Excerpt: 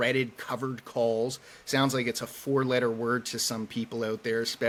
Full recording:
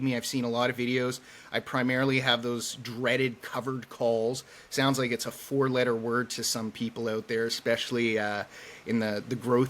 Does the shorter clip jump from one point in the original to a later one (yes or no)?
no